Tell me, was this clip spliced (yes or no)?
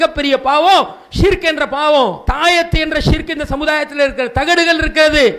yes